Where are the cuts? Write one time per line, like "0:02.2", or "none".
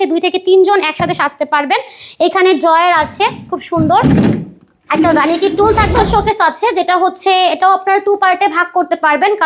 0:06.1